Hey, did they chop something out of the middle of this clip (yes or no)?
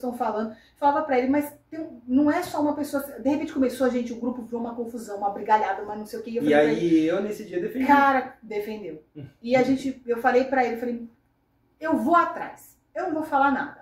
no